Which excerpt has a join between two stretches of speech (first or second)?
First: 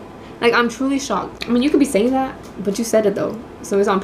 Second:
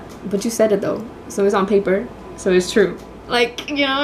first